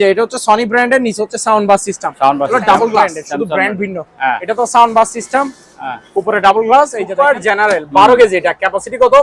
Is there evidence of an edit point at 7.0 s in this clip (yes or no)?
yes